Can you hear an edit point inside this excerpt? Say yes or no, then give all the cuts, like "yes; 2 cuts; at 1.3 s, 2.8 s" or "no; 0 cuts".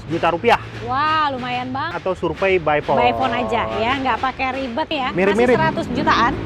yes; 2 cuts; at 1.9 s, 4.9 s